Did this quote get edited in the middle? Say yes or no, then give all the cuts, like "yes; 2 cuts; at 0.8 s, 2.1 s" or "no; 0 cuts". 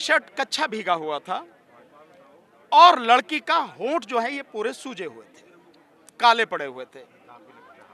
no; 0 cuts